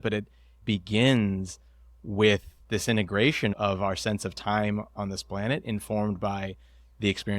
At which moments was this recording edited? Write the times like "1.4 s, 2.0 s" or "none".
2.5 s